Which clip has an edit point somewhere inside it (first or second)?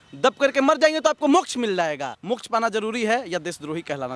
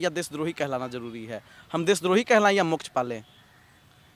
first